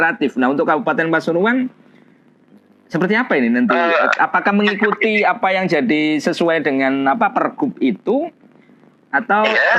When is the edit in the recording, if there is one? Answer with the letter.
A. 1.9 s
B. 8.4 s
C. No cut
C